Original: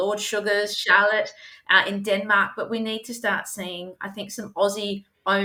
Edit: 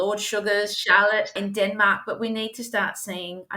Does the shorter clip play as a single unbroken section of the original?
no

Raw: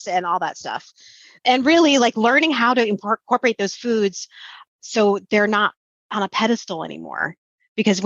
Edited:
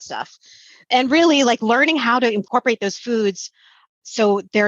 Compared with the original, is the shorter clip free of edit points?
no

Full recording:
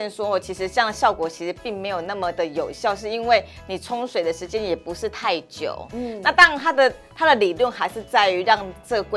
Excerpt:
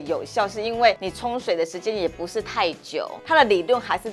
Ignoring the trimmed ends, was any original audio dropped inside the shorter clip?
yes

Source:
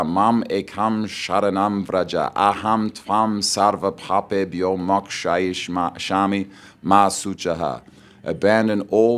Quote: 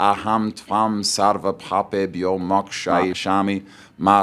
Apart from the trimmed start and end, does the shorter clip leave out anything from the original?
yes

